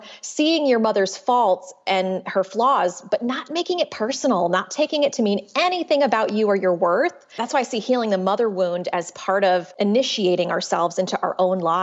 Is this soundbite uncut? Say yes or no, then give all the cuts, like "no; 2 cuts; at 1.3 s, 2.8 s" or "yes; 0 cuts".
no; 2 cuts; at 7.2 s, 9.7 s